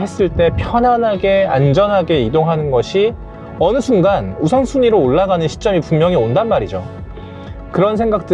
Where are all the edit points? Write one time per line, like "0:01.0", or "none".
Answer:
none